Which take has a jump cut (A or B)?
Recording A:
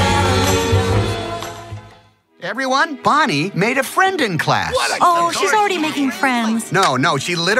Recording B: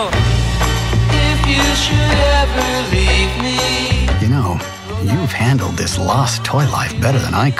A